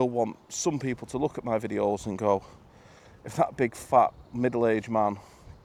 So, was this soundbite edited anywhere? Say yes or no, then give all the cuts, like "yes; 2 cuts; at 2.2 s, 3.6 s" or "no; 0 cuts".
no; 0 cuts